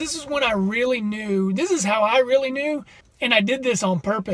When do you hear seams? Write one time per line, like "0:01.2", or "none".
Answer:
0:03.2

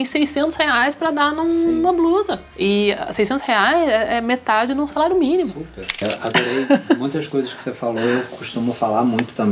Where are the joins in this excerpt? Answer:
0:02.4
0:06.0

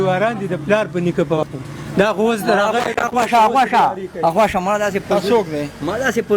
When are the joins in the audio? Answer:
0:01.4

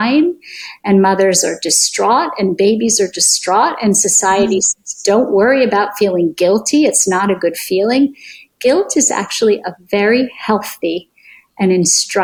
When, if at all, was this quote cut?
none

